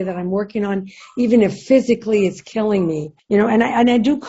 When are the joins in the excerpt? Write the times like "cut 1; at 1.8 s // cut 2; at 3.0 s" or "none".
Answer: cut 1; at 3.2 s